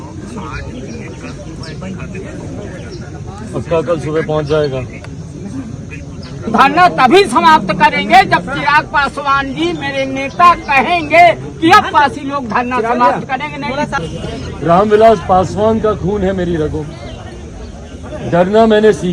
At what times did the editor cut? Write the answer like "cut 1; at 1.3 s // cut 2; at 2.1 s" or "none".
cut 1; at 6.5 s // cut 2; at 14.0 s